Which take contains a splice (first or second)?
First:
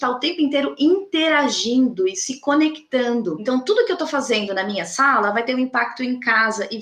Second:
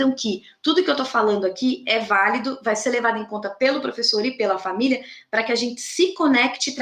first